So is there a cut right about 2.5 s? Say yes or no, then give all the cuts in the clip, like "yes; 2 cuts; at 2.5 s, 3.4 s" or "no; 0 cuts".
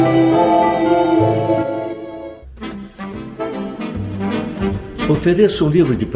yes; 1 cut; at 2.5 s